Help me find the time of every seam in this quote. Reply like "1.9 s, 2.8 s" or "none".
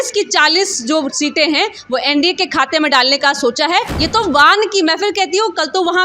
3.9 s